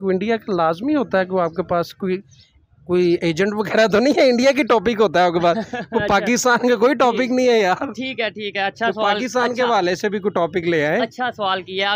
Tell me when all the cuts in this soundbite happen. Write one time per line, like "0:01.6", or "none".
none